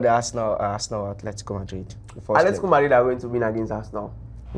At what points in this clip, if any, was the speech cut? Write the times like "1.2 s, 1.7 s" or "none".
none